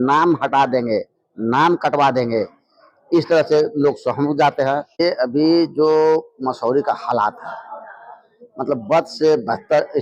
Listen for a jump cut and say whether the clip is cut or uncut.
cut